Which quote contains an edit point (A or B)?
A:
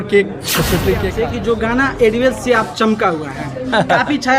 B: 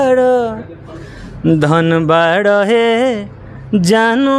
A